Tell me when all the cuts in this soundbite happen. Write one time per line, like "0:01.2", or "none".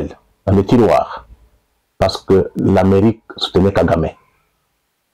none